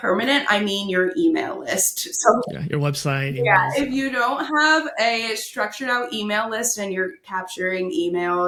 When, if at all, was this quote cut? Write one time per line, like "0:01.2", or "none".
none